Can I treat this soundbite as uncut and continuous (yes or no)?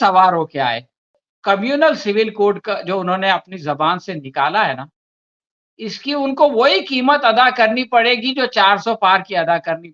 no